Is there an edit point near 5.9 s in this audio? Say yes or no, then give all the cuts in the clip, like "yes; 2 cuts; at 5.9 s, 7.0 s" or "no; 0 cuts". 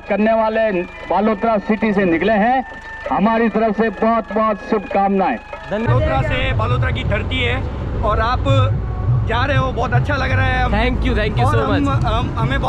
yes; 1 cut; at 5.9 s